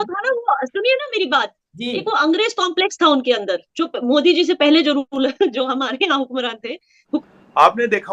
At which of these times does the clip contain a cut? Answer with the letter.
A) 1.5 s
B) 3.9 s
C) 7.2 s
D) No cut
C